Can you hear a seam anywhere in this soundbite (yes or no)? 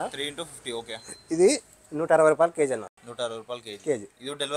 no